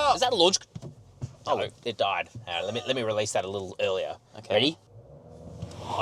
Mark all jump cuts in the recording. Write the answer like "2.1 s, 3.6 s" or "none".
none